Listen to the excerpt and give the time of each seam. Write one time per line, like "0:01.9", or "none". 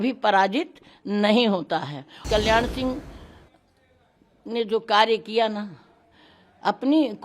0:02.2